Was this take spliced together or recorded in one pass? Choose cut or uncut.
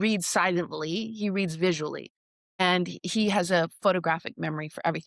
uncut